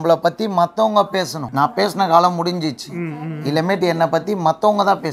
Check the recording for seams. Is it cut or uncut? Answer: cut